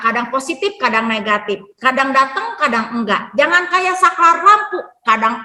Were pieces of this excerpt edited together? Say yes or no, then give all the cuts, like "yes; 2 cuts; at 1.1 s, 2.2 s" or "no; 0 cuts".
no; 0 cuts